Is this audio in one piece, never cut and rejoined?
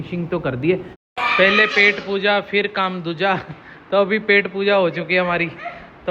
no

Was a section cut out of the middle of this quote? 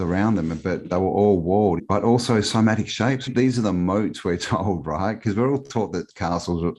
yes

